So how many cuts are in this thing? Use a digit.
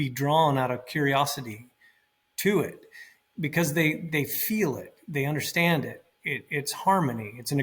0